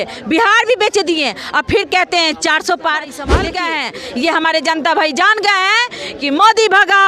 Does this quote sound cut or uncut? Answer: cut